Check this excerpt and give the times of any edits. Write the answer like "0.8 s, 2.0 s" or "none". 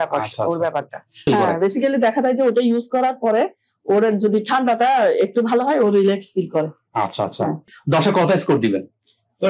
1.2 s, 7.8 s